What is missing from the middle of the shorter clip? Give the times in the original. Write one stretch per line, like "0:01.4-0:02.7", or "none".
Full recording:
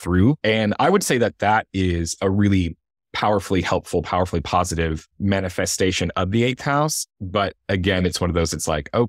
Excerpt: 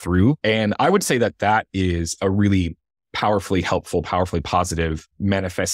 none